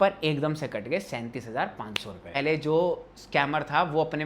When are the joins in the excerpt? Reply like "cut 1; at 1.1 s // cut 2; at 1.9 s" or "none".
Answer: cut 1; at 2.3 s